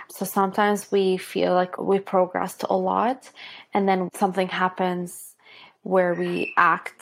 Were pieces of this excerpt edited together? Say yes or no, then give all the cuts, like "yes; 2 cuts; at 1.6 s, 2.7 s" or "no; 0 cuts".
yes; 1 cut; at 1.7 s